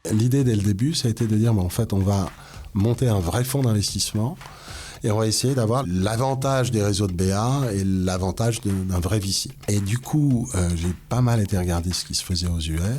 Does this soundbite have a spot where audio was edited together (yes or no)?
yes